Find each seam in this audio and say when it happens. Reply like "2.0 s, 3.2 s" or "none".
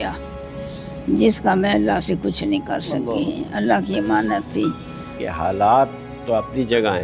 5.2 s